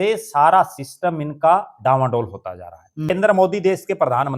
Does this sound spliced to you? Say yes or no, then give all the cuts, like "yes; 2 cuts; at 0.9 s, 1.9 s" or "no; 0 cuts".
yes; 1 cut; at 3.1 s